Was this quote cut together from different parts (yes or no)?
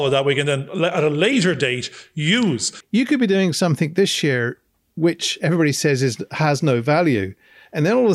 yes